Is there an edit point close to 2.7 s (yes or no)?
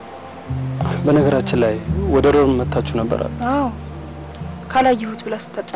no